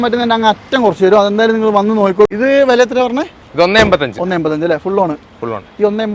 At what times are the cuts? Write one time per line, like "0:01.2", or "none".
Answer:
0:02.3